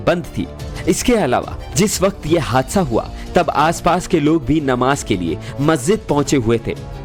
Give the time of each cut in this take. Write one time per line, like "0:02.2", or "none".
none

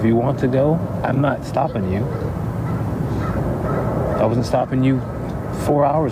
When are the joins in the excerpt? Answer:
none

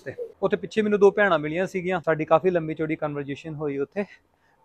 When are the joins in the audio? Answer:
0:02.0

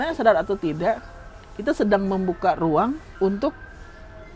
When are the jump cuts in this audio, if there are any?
0:03.1

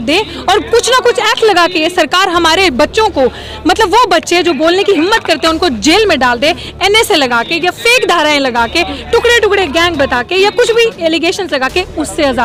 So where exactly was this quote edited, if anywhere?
none

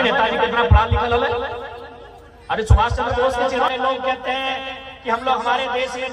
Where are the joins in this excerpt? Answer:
0:03.6

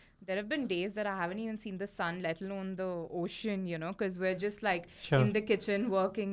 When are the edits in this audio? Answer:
none

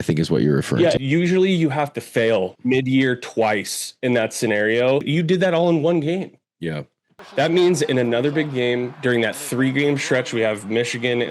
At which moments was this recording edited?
0:05.0

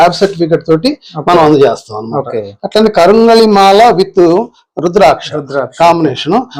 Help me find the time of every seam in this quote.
none

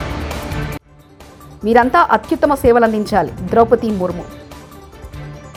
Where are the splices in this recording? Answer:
none

